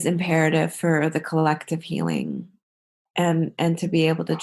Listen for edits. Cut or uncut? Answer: uncut